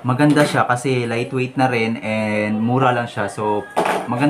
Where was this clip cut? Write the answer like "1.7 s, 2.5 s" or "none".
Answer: none

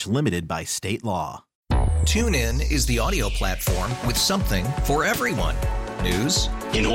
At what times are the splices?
1.5 s

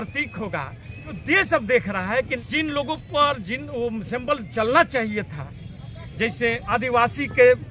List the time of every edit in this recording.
1.2 s, 2.3 s, 6.6 s

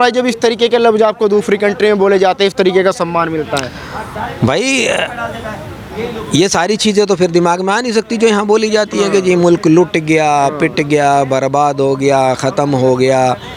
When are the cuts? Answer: none

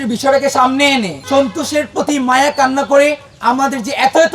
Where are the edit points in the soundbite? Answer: 1.2 s, 3.3 s

